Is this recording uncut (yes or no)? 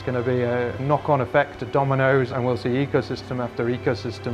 no